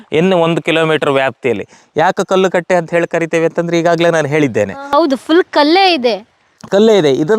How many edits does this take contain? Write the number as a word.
zero